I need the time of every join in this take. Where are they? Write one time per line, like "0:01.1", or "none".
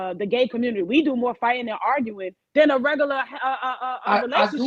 none